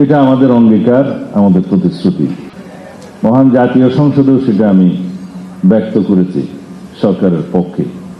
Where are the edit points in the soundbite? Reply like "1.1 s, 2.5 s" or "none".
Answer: 2.5 s